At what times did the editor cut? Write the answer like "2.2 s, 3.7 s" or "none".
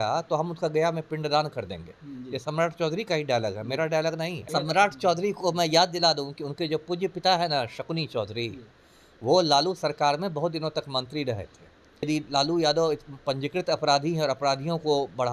4.4 s, 12.0 s